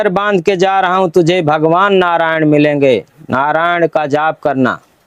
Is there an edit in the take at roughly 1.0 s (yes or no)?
no